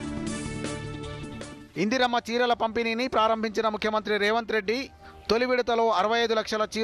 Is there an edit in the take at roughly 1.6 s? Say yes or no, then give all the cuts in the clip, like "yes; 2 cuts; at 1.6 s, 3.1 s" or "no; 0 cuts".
yes; 1 cut; at 1.6 s